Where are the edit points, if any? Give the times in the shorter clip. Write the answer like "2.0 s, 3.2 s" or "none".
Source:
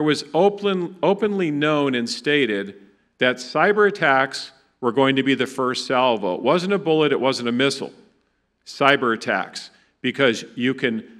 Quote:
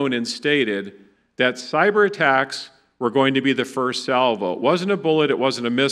none

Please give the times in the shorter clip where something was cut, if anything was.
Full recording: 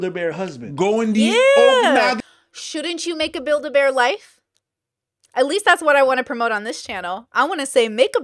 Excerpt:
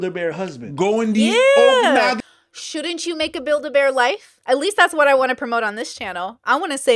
4.3 s

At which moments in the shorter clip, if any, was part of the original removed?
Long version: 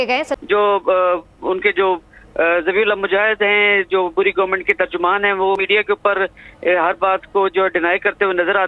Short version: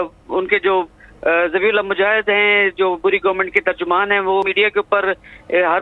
none

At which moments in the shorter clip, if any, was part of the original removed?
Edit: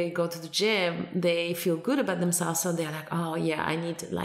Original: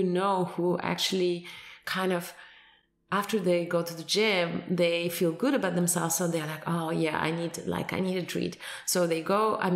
none

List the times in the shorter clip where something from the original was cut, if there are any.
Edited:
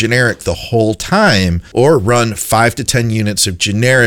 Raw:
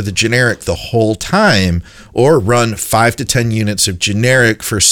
1.6 s

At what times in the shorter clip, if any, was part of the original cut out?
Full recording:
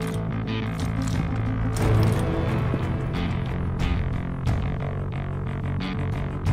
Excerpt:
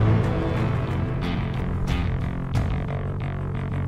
none

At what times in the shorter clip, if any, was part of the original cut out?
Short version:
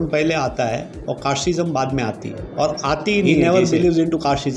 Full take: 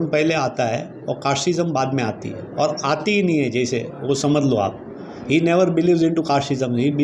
3.3 s

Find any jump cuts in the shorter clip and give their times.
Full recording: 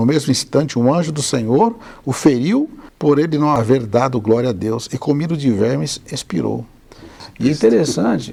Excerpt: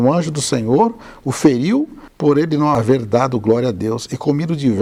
none

